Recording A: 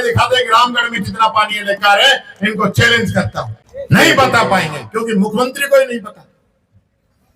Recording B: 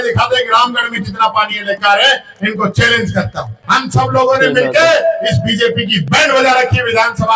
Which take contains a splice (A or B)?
B